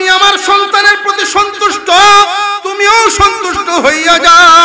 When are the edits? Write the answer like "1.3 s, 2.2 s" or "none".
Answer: 2.6 s

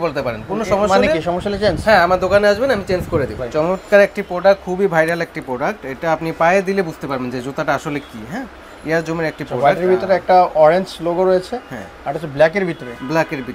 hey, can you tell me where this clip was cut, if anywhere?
3.4 s

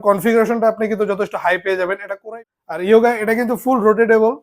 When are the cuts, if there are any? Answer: 2.2 s

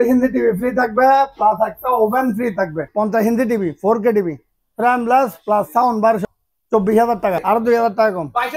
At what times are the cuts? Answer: 2.9 s, 6.2 s, 7.4 s

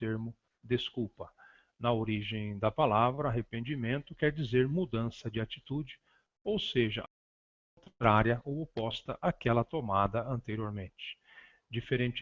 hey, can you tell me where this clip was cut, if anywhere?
2.5 s

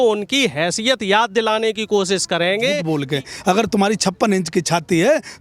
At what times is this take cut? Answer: 2.9 s

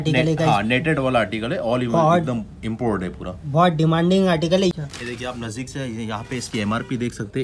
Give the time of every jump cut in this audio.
4.8 s

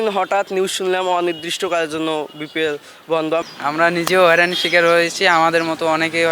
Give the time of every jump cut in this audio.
3.4 s

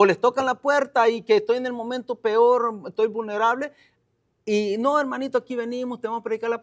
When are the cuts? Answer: none

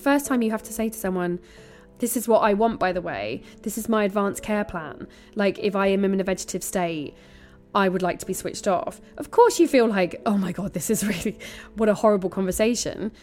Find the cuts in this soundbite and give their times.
none

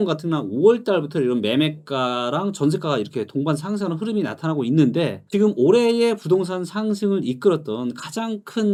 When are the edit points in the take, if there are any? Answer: none

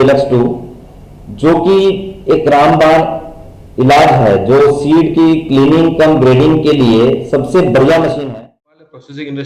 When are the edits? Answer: 8.2 s

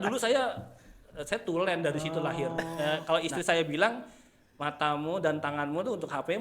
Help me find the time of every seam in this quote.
2.7 s

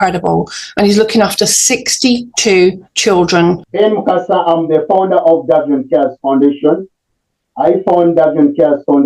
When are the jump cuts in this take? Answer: 3.7 s

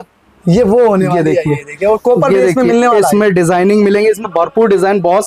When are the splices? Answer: none

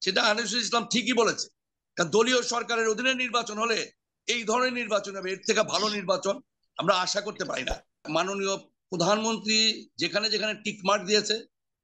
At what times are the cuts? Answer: 8.1 s

